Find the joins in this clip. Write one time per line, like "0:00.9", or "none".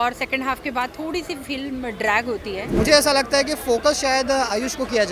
0:02.7